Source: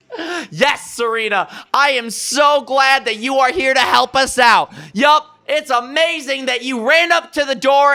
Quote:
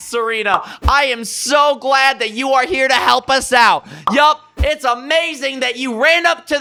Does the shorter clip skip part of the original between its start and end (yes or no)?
no